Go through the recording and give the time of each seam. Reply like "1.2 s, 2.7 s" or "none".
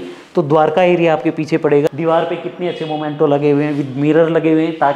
1.9 s